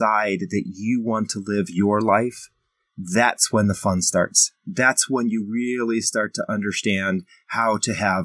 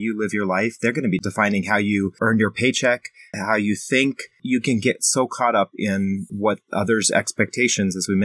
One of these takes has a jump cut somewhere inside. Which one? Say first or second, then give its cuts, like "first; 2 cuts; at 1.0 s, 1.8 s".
second; 5 cuts; at 1.2 s, 2.2 s, 3.3 s, 4.4 s, 6.3 s